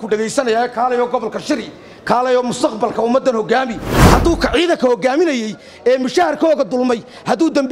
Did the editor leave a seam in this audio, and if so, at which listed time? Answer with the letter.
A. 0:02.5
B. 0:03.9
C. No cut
B